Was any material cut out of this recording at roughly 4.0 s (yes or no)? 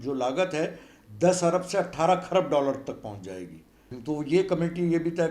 yes